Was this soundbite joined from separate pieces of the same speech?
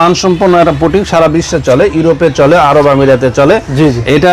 no; 0 cuts

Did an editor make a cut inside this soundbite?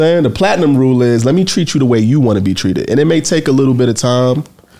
no; 0 cuts

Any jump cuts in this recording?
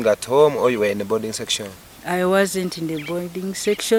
no; 0 cuts

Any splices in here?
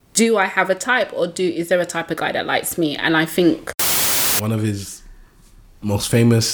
yes; 1 cut; at 4.3 s

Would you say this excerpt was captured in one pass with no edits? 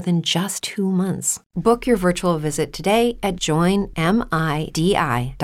no; 2 cuts; at 1.0 s, 3.4 s

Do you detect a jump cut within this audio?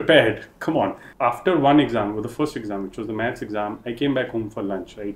yes; 1 cut; at 1.0 s

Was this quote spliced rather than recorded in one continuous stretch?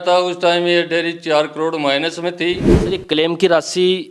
yes; 1 cut; at 2.7 s

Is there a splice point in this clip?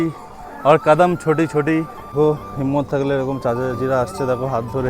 yes; 1 cut; at 2.0 s

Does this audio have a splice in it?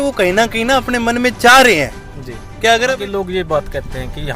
yes; 1 cut; at 2.9 s

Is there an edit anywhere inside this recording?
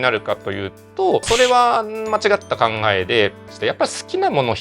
yes; 2 cuts; at 1.2 s, 3.4 s

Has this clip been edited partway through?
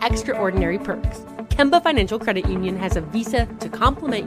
no; 0 cuts

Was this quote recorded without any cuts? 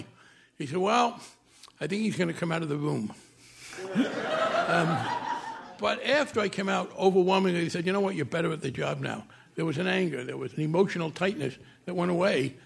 no; 2 cuts; at 6.3 s, 10.5 s

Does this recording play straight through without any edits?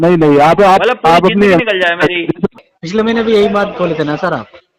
no; 1 cut; at 2.7 s

